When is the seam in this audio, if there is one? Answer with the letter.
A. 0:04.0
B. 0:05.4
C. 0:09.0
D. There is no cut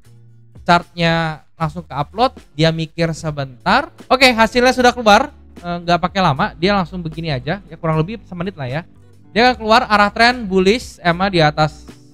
A